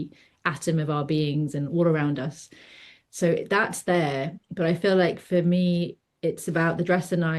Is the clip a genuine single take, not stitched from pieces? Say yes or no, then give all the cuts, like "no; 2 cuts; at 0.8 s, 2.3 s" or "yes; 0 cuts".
yes; 0 cuts